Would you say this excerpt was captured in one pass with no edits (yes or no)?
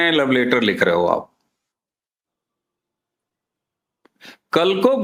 yes